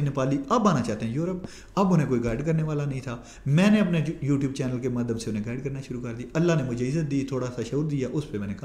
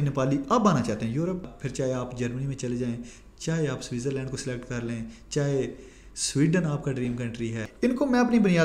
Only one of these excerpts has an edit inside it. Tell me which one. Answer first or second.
second